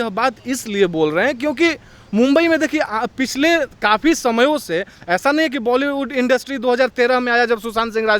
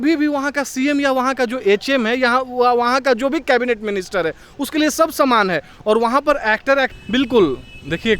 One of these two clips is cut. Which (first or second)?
second